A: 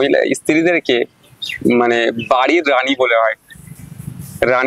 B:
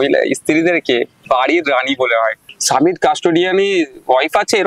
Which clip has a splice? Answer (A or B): B